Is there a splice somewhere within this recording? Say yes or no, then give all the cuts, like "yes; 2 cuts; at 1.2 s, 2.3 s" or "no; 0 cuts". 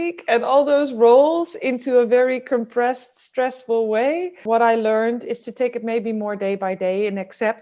yes; 1 cut; at 4.4 s